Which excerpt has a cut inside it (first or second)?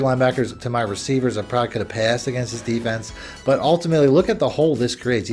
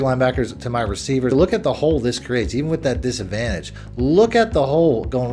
second